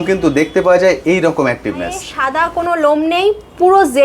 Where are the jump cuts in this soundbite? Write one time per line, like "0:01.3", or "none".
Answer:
0:02.1